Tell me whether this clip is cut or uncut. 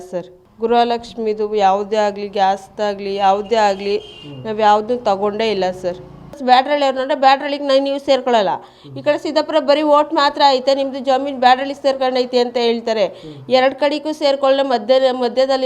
cut